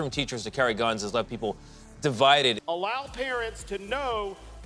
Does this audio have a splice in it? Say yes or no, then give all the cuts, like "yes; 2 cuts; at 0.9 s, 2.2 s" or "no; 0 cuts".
no; 0 cuts